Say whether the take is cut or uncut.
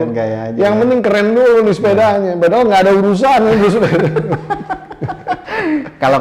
uncut